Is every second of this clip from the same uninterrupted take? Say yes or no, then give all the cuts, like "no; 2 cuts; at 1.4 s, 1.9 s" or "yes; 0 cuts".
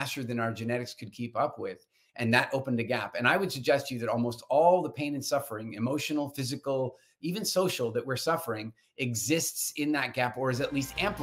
yes; 0 cuts